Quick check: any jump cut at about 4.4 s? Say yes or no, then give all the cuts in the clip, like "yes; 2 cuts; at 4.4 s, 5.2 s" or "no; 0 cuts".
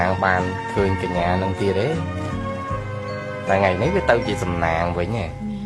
no; 0 cuts